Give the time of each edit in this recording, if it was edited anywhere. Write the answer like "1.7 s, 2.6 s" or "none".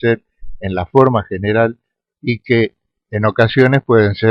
none